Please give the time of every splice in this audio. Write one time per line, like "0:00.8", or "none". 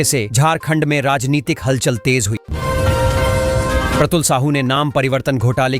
0:02.5
0:04.0